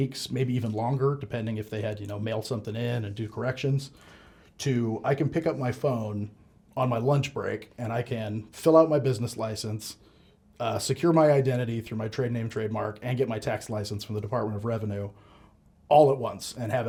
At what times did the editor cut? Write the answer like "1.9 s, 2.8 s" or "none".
none